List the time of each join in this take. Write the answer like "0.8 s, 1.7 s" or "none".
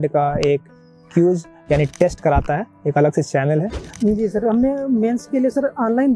3.8 s